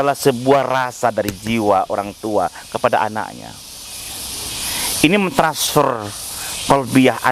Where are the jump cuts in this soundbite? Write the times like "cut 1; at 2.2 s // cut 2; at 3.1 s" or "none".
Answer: none